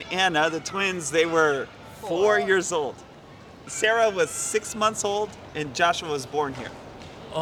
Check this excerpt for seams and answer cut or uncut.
uncut